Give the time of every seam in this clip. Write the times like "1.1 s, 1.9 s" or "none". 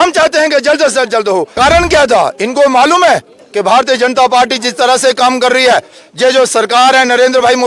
1.5 s